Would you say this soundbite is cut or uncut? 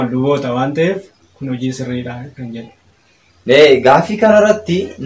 uncut